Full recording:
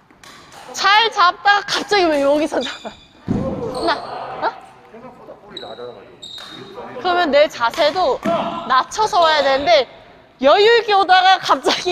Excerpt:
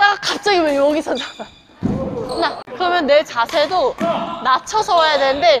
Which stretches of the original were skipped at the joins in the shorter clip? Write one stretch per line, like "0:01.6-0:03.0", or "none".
0:04.1-0:06.9